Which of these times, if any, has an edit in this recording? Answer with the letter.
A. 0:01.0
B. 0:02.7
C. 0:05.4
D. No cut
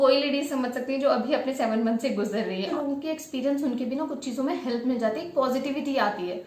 B